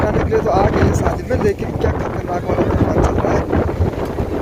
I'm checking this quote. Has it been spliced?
no; 0 cuts

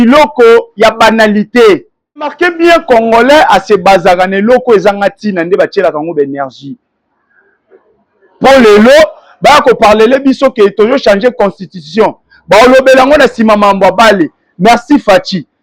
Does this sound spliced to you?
yes; 1 cut; at 2.4 s

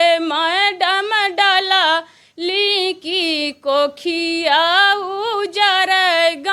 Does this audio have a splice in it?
no; 0 cuts

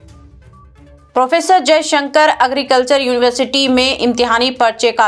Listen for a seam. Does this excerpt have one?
yes; 1 cut; at 0.9 s

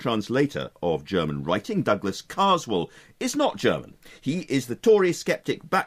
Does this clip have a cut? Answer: yes; 1 cut; at 4.0 s

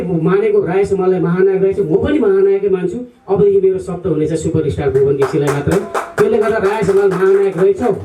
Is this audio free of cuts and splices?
yes; 0 cuts

